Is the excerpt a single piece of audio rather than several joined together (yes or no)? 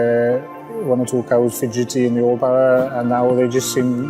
yes